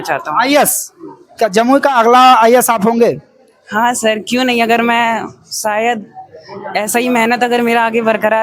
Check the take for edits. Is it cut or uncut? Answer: uncut